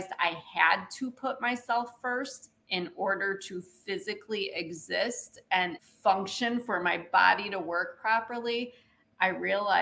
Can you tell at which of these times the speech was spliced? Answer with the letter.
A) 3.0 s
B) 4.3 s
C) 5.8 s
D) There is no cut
C